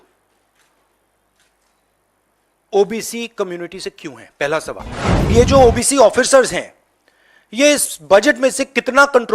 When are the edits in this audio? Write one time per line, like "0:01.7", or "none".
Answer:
0:05.3